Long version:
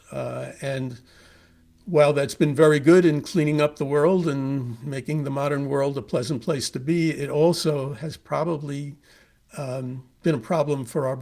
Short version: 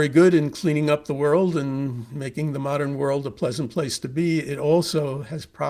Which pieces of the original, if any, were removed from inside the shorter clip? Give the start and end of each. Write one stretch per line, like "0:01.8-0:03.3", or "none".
none